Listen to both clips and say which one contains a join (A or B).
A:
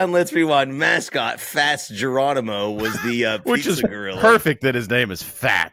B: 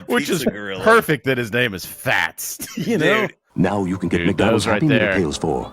B